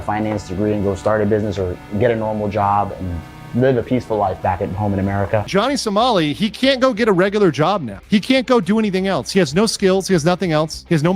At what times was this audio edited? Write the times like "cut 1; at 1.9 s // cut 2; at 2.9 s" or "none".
cut 1; at 5.5 s